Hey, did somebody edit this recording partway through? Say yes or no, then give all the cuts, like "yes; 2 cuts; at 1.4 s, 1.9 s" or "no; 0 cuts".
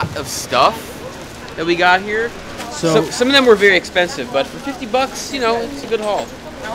no; 0 cuts